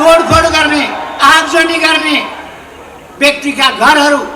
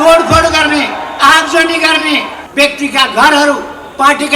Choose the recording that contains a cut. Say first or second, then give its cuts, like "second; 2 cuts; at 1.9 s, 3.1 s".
second; 1 cut; at 2.4 s